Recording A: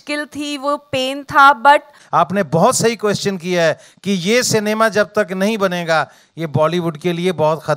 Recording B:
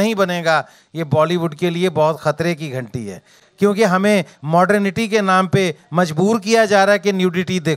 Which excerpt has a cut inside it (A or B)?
A